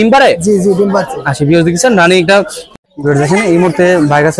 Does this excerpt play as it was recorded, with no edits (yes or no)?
no